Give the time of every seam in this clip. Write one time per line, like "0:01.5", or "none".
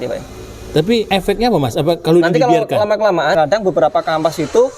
0:01.1
0:03.3